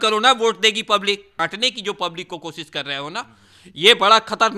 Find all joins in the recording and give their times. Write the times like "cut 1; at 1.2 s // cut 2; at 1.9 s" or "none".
cut 1; at 1.3 s